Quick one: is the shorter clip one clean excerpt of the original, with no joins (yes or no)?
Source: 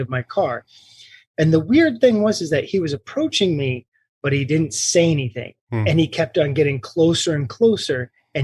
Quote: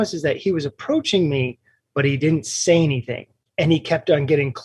yes